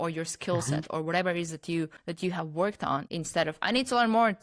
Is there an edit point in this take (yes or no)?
yes